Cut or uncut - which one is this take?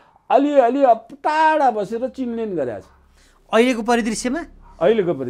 uncut